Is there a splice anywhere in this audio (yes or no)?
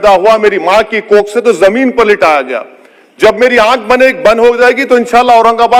no